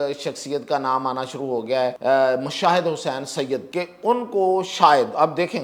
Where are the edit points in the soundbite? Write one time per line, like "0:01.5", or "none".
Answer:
0:02.0
0:03.7